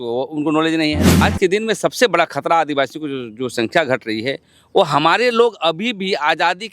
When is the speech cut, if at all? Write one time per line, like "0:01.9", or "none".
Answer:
0:01.2